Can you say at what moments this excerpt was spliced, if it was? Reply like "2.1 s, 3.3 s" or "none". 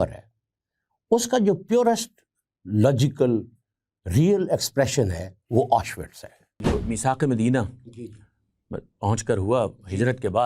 6.6 s